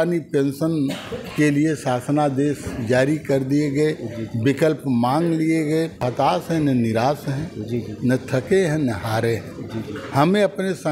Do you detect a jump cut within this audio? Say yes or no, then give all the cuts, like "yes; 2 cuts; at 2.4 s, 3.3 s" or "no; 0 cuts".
yes; 1 cut; at 6.1 s